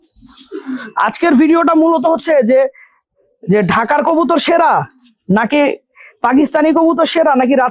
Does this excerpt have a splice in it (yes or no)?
no